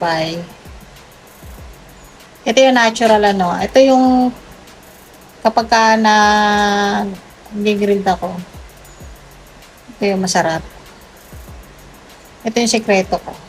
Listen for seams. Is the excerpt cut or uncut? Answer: uncut